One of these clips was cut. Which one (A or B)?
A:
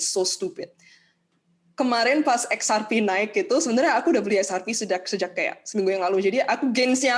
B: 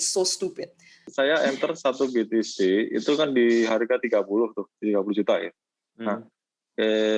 B